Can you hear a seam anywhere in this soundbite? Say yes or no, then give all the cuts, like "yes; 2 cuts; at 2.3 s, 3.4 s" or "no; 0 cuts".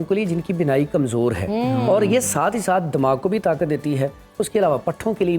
no; 0 cuts